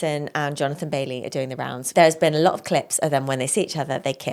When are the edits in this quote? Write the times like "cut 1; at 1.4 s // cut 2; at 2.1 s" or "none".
cut 1; at 1.8 s